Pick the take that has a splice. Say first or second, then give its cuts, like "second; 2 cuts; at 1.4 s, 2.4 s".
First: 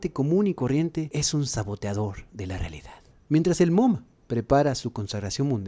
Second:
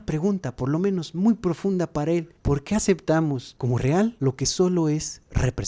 second; 1 cut; at 2.3 s